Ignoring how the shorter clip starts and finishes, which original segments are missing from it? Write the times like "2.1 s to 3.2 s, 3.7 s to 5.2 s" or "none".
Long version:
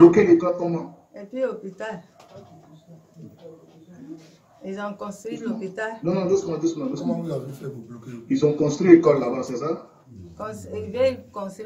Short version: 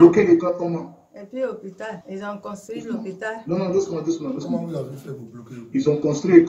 2.0 s to 4.6 s